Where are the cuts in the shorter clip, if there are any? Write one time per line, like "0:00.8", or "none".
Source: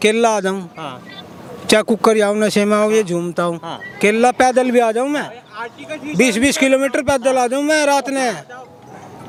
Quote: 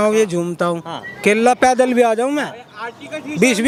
none